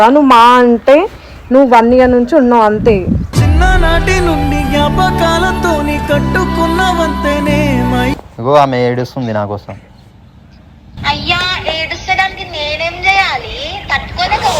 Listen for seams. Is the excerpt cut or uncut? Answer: cut